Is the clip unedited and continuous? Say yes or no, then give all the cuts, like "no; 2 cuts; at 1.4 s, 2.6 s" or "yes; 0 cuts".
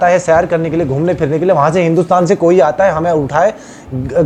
yes; 0 cuts